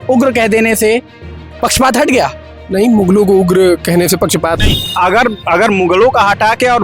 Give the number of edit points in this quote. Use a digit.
1